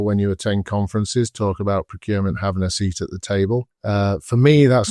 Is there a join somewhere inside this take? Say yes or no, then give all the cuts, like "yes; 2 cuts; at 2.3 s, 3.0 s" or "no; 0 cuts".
yes; 1 cut; at 3.7 s